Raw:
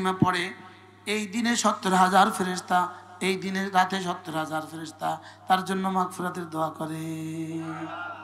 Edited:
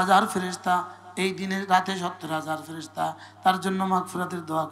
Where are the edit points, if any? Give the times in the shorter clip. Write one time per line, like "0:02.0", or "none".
none

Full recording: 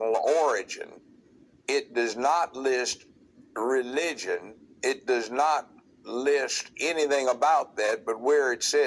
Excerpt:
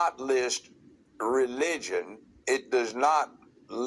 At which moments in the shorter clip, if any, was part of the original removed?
none

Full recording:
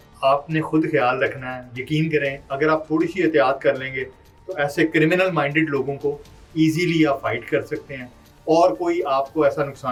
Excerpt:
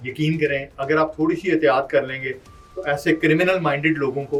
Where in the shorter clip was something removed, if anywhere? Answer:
none

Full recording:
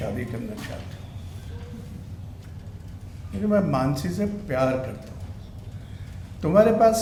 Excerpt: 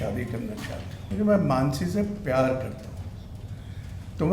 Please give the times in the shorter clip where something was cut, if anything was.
0:00.9

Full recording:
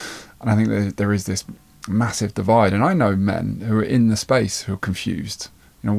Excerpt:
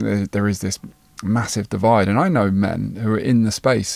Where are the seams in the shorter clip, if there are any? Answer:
none

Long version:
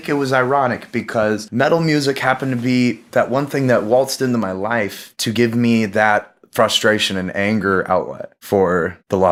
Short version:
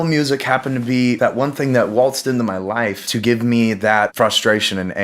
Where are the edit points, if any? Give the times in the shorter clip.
0:01.2
0:03.0
0:04.1

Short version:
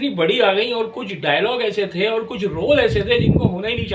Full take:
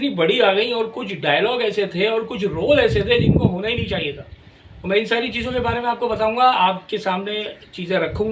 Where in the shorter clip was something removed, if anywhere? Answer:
none

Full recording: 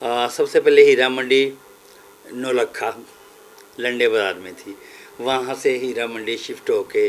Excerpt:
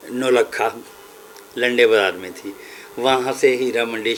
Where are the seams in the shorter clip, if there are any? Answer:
none

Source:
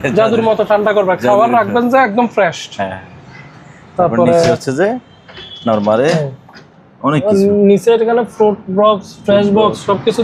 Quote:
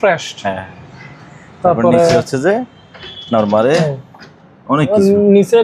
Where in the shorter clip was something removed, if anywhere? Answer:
none

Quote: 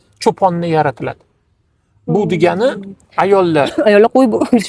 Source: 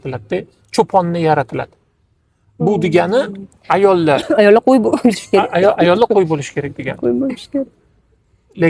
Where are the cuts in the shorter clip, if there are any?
none

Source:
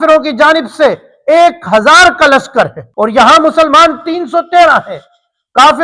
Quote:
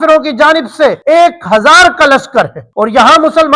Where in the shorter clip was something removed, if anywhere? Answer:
0:01.0

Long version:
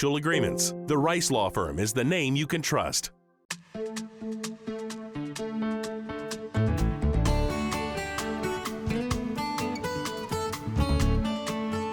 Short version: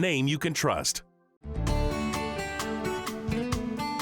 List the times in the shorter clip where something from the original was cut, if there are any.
0:01.5

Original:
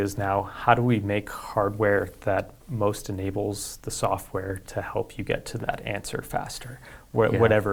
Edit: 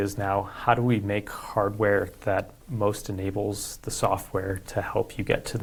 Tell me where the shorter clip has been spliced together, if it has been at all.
none

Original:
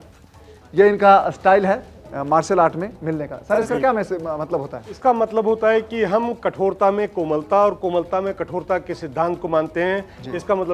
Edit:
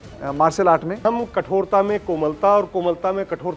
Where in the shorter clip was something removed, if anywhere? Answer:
0:01.0

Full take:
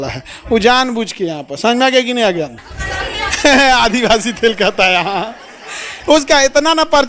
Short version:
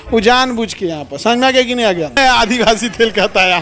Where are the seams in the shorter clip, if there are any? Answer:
0:02.2

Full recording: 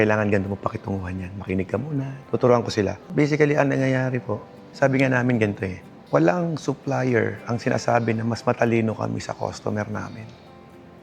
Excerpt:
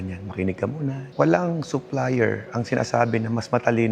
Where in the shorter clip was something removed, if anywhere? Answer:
0:01.0

